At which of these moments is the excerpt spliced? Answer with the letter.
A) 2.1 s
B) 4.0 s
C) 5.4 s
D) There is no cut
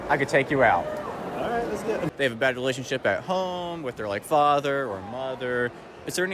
A